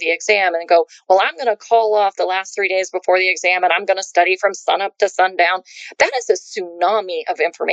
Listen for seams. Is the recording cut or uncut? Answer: uncut